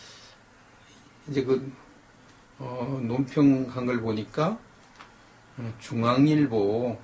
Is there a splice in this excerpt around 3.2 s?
no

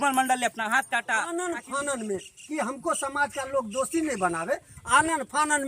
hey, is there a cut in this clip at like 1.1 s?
yes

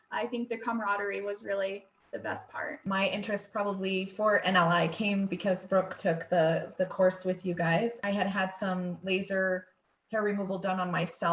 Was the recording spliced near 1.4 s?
no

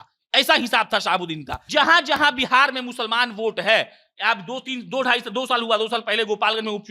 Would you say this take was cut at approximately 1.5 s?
yes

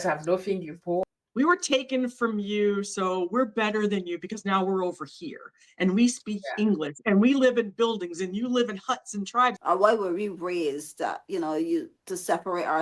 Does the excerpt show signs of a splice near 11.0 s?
no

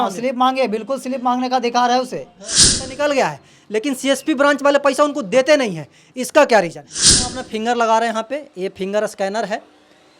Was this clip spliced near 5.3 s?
no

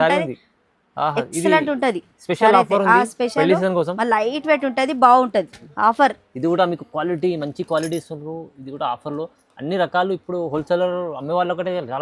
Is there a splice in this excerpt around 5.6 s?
yes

